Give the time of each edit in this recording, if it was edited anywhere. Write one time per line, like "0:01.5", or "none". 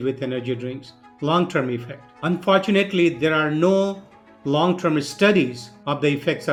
none